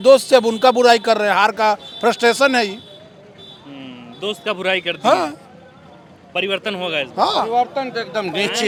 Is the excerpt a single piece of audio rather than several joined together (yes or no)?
yes